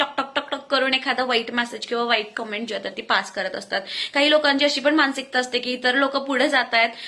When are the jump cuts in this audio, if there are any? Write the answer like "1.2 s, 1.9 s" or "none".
none